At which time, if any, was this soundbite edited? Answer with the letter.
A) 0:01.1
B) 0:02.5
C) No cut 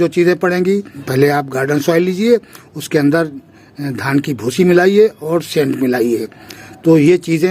A